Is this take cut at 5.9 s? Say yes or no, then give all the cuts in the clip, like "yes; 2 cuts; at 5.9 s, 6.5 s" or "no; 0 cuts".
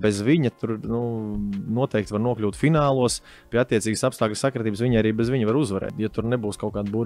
yes; 1 cut; at 5.9 s